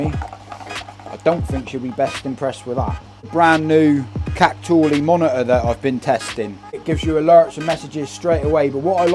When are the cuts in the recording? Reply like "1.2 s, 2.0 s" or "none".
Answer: 3.3 s, 6.7 s